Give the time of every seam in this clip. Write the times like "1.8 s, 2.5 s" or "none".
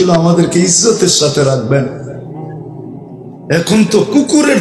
2.0 s, 3.5 s